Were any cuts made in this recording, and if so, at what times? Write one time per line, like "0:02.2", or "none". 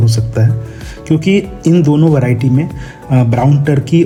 none